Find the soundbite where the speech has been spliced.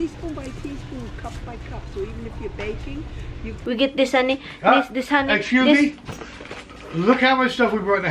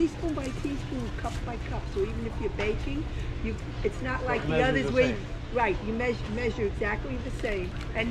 first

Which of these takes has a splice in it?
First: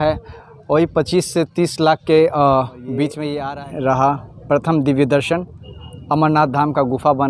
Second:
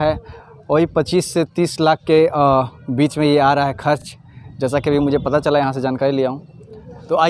first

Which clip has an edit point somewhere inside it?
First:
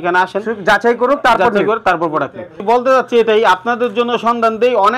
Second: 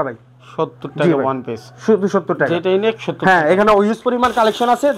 first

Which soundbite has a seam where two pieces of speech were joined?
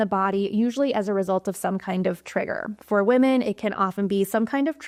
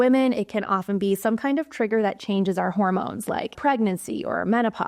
second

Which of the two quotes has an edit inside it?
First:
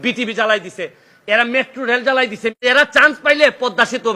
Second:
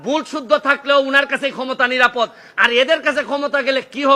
first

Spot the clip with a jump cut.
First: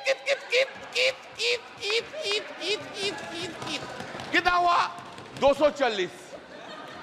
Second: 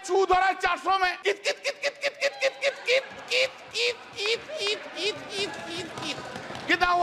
second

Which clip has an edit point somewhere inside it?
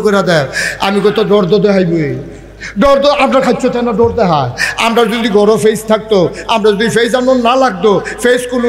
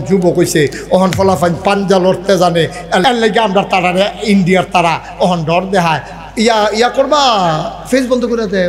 second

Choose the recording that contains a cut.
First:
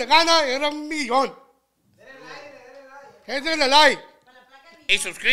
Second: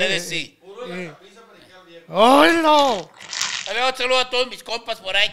second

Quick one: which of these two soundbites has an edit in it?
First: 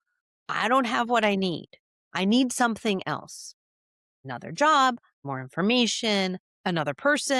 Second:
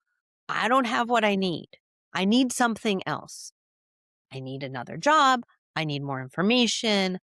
first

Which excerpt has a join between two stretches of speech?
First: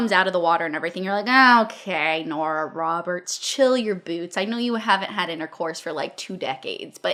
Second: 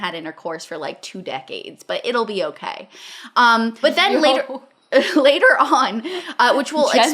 second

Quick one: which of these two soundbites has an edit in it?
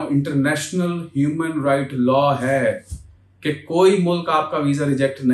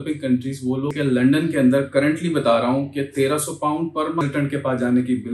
second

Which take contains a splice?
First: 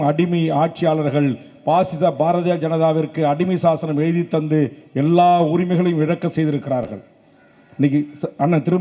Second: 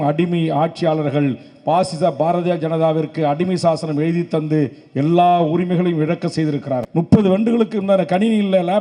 second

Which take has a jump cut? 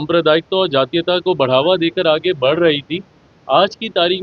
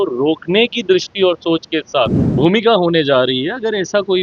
second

